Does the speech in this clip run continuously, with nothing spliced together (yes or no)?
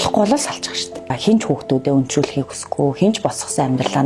no